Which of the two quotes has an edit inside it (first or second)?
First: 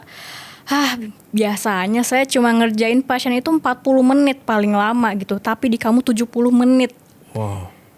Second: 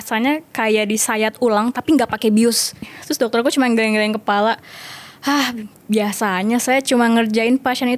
second